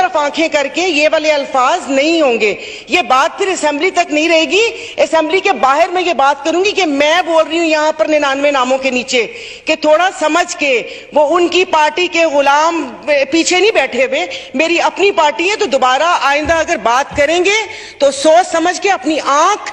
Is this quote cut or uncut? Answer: uncut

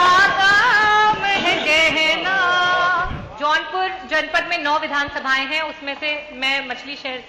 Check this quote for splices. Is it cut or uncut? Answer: cut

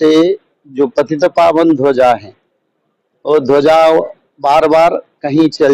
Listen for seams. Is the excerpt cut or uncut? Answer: uncut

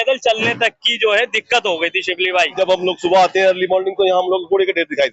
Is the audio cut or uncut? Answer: cut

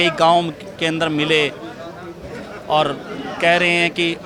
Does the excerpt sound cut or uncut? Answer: uncut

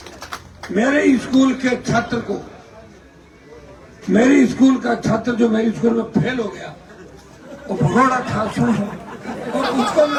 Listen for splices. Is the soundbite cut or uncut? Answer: uncut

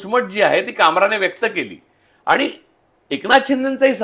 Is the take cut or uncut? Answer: uncut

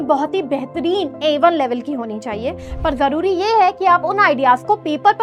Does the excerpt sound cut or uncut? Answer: uncut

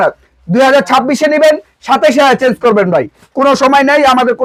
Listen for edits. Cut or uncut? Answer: uncut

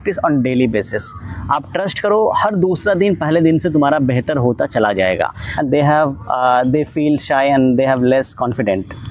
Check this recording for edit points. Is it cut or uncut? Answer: cut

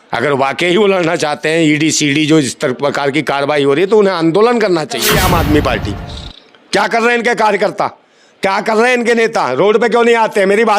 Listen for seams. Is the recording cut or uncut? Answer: cut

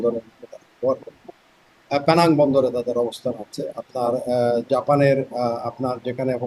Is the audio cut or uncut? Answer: uncut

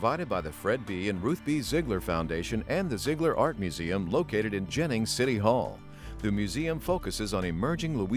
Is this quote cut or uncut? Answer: uncut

